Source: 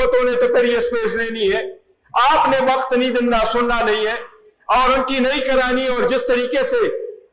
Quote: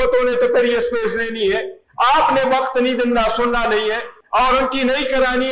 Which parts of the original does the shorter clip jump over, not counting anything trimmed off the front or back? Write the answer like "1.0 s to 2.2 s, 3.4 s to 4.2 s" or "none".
1.8 s to 1.9 s, 4.3 s to 4.5 s

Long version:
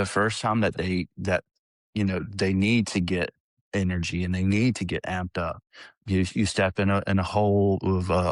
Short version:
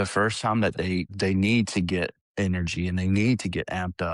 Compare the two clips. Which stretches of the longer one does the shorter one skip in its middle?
1.1 s to 2.3 s, 3.4 s to 3.6 s

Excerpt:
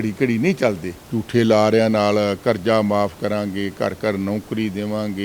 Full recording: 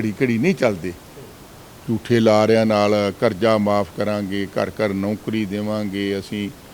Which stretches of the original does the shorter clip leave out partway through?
0.9 s to 1.7 s

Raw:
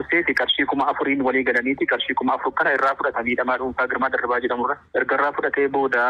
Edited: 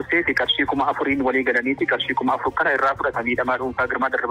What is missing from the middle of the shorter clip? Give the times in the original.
none

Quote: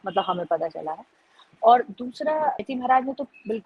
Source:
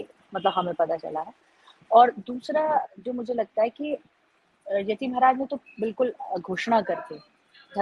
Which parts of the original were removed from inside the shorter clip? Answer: 2.9 s to 5.0 s

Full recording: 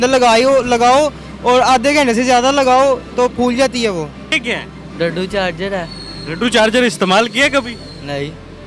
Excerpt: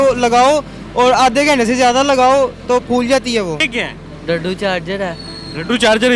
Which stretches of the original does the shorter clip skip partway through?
4.1 s to 4.3 s

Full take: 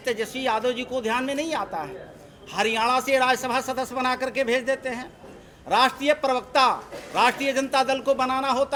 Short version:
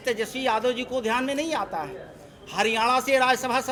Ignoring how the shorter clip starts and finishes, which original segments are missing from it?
none

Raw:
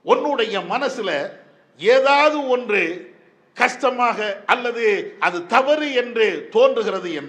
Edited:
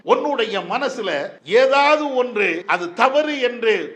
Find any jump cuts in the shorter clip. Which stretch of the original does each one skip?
1.3 s to 1.7 s, 3.4 s to 5.6 s

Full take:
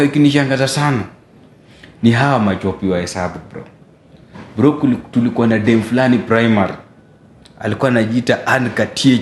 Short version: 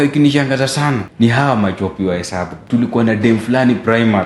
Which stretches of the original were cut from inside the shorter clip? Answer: 1.1 s to 1.9 s, 3.4 s to 5.0 s

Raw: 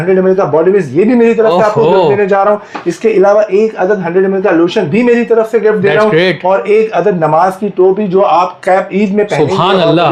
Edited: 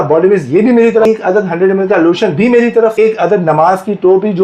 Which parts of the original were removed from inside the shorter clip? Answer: 1.5 s to 3.6 s, 5.5 s to 6.7 s

